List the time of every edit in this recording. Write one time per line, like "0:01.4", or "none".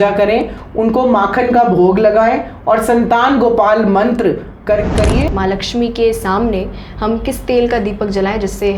0:05.2